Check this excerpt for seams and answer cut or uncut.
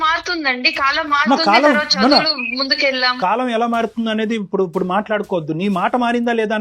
cut